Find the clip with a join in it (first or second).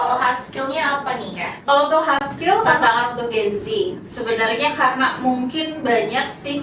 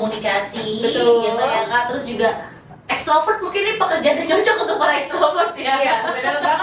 first